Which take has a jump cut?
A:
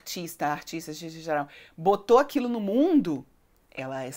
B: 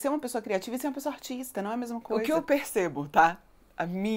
B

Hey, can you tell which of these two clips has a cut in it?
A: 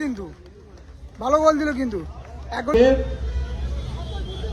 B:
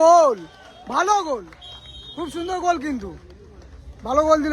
A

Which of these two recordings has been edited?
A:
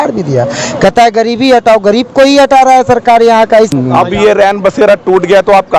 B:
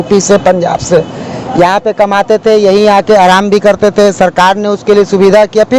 A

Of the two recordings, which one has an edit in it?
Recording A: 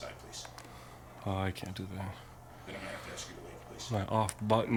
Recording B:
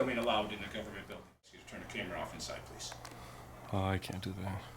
B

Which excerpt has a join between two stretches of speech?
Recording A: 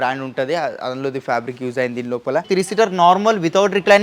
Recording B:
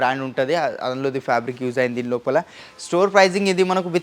A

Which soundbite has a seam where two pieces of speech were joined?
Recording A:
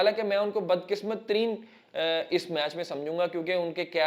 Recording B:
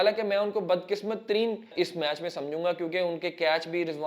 B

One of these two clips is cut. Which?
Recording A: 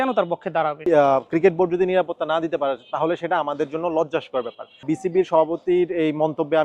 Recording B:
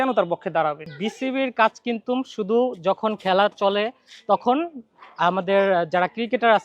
A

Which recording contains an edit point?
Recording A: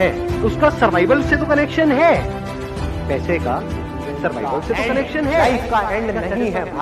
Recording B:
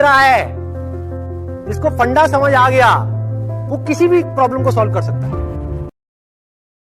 A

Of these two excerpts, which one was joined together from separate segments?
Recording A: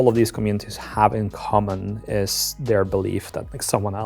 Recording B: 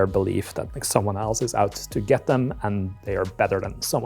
B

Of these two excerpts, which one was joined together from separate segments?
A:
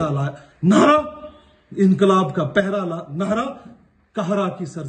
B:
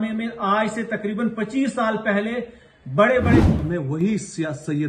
B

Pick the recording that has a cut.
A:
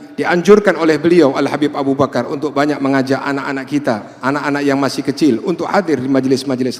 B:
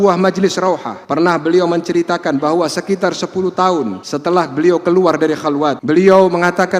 B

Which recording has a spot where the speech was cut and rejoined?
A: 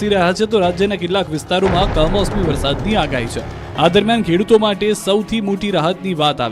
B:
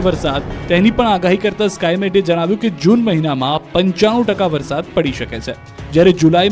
B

